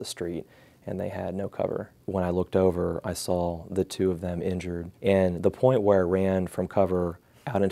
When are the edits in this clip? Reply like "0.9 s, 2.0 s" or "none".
2.0 s, 4.9 s